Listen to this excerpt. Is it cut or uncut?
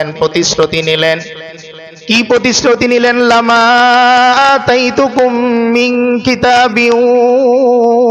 uncut